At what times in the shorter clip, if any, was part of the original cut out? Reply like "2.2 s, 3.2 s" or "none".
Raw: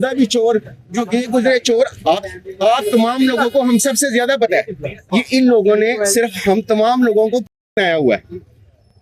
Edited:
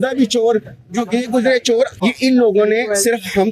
1.9 s